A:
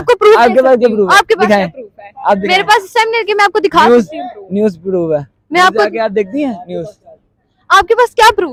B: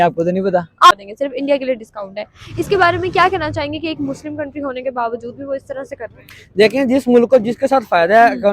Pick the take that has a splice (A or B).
B